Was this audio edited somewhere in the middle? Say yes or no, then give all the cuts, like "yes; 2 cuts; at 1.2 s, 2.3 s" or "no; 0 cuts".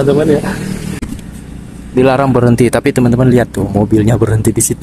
yes; 1 cut; at 1.0 s